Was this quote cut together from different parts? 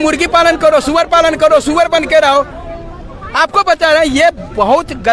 no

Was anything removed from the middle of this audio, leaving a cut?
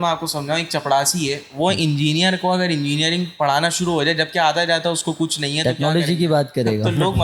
no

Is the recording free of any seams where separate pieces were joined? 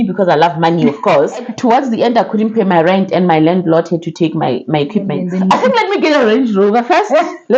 no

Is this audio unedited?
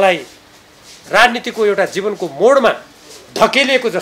yes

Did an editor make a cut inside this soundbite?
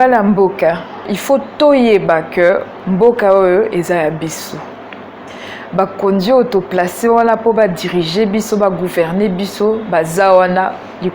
yes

